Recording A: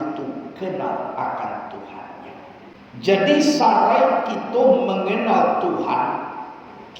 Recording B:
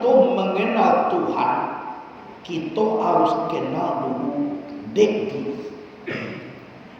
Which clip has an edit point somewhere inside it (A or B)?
A